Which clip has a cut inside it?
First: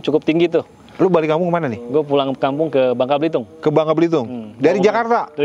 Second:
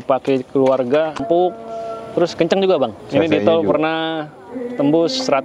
second; 2 cuts; at 1.2 s, 3.0 s

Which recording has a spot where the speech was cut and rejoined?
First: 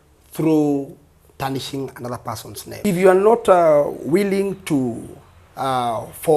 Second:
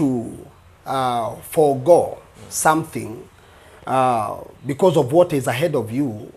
first; 1 cut; at 2.8 s

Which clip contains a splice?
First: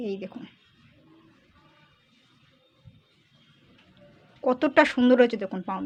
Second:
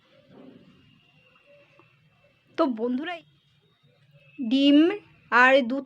second; 1 cut; at 3.1 s

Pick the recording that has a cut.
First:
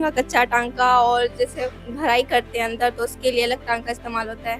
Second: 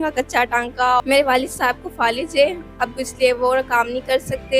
second; 1 cut; at 1.0 s

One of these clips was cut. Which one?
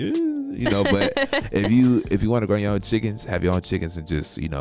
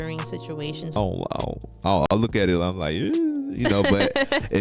second; 1 cut; at 1.0 s

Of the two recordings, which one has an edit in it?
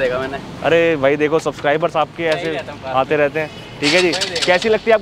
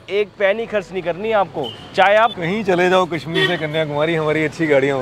second; 1 cut; at 2.4 s

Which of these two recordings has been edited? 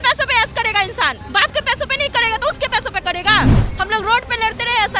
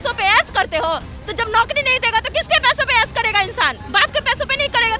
first; 1 cut; at 3.6 s

